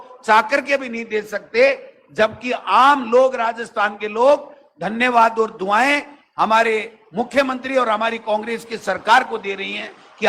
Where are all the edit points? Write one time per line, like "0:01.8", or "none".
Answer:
none